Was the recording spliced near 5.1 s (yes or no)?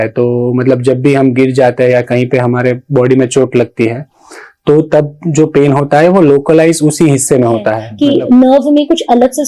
no